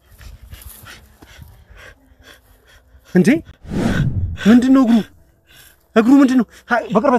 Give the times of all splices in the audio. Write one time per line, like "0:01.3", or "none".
none